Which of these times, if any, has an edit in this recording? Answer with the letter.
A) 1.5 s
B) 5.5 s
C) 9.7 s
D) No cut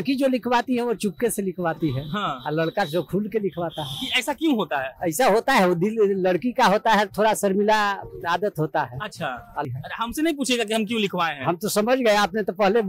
C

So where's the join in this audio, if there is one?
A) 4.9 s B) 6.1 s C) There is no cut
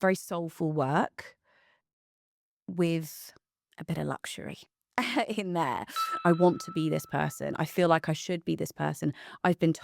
B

